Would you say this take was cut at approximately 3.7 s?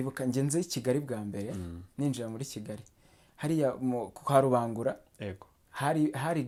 no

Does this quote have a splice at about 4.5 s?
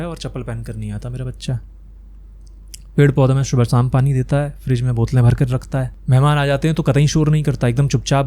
no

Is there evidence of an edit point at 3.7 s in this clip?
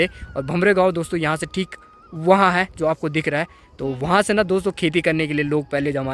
no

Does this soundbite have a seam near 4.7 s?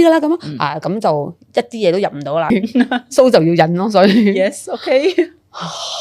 no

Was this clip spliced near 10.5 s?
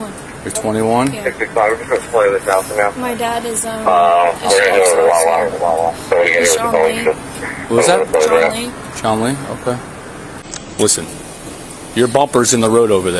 yes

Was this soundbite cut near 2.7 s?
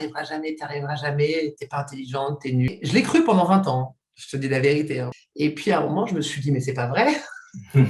yes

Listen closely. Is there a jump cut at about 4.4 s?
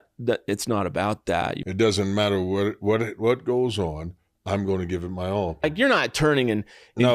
no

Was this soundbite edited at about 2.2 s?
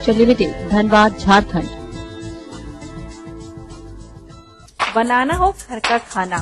no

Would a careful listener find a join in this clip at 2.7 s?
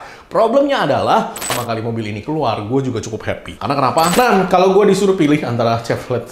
no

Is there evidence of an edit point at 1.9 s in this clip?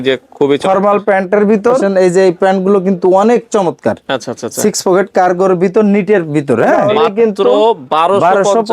yes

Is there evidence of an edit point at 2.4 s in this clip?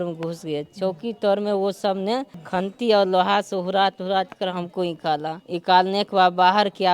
yes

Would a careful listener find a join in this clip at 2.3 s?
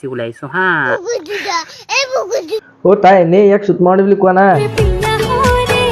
no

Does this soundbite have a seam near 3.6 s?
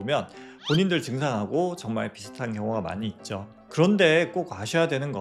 yes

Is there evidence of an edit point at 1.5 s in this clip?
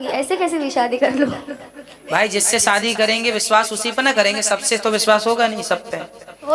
no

